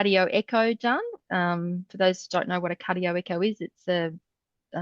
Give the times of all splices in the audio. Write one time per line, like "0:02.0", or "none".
none

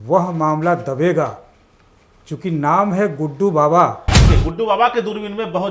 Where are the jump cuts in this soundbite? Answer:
0:04.3

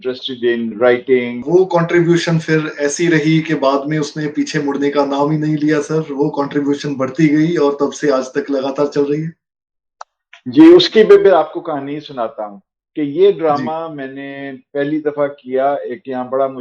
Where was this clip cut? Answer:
0:01.4

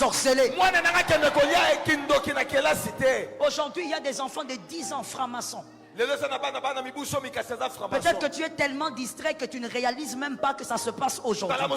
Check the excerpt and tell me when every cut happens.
none

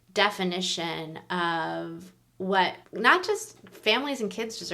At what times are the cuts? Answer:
0:02.8

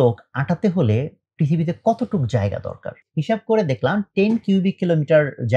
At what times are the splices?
0:03.0

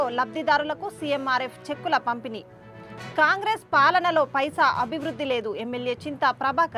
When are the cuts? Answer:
none

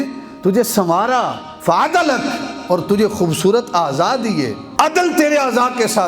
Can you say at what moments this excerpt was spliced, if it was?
0:01.5
0:04.6

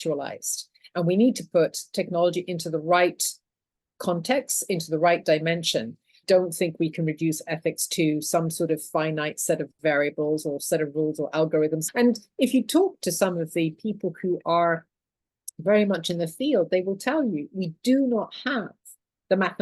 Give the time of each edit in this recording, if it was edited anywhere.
0:06.2
0:11.8

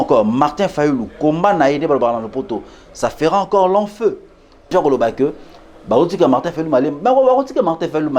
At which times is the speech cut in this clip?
0:04.7

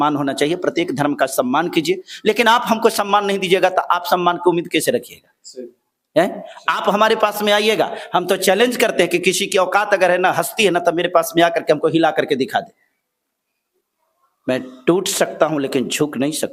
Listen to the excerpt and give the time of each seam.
none

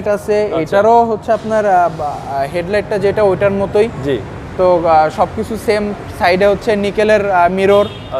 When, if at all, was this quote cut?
none

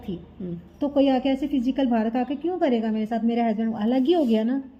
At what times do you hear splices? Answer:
none

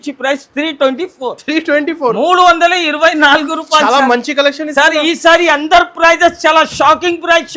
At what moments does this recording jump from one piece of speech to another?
none

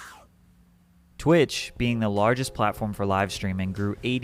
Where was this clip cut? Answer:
none

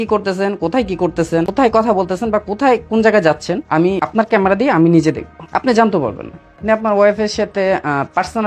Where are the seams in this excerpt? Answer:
0:01.5
0:03.9
0:05.3
0:06.6

